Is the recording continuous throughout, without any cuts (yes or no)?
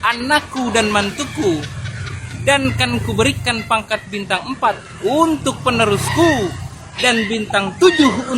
yes